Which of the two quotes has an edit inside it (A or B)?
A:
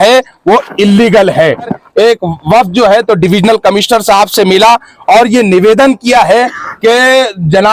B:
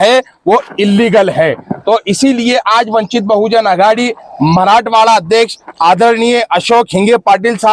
A